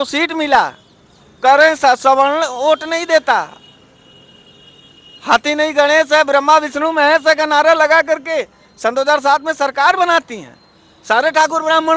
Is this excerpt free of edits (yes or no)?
yes